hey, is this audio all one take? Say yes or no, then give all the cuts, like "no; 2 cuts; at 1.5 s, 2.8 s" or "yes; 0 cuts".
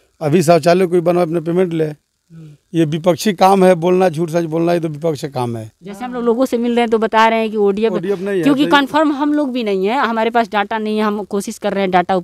yes; 0 cuts